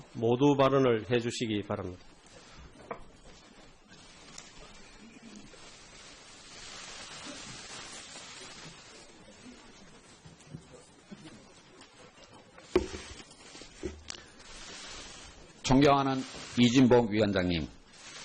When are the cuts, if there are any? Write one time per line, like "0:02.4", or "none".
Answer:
0:15.8